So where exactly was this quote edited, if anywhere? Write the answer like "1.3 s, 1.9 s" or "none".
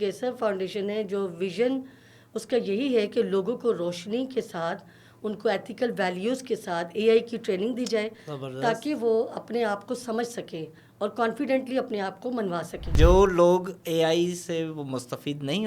12.9 s